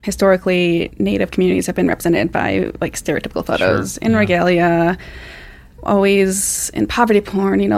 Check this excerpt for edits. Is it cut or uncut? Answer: cut